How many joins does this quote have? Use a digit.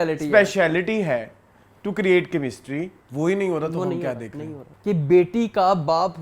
2